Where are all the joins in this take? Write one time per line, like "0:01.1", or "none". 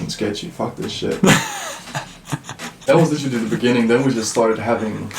0:02.8